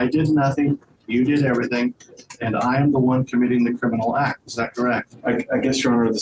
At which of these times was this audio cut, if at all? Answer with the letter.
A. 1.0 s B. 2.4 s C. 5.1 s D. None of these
D